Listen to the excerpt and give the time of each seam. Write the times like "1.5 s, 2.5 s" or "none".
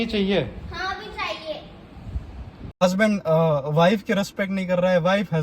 2.7 s